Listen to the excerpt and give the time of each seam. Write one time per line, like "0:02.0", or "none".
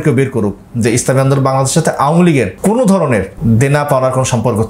0:02.5
0:03.3

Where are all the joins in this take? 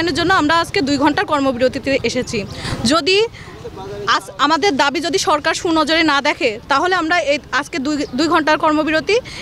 none

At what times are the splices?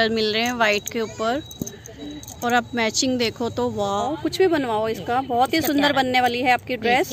0:04.0

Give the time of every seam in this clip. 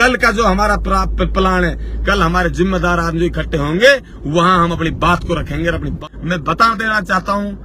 0:06.0

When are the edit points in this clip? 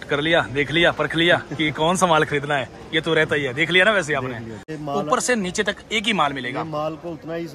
0:04.6

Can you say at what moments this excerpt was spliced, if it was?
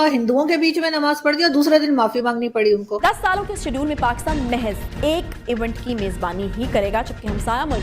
0:02.9

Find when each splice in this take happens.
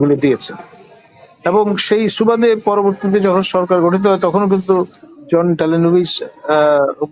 none

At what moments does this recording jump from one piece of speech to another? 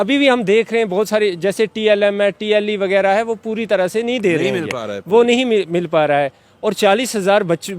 none

